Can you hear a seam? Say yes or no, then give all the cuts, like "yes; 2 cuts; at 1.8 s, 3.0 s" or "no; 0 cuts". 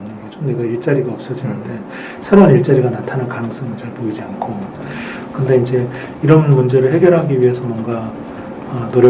no; 0 cuts